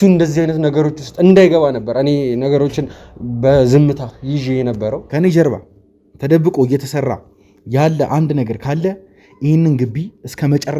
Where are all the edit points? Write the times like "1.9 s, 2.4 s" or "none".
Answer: 5.0 s